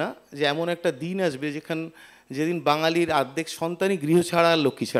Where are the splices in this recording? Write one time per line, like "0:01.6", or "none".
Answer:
none